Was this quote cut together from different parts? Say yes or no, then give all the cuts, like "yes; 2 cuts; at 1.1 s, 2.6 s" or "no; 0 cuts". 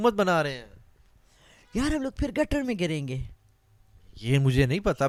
no; 0 cuts